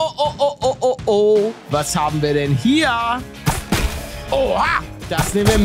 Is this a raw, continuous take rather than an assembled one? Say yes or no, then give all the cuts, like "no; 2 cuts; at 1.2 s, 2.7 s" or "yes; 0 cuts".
no; 2 cuts; at 1.6 s, 3.3 s